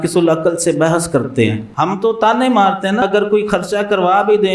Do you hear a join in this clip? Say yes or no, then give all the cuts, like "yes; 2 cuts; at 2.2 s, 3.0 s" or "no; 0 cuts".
yes; 2 cuts; at 1.6 s, 3.0 s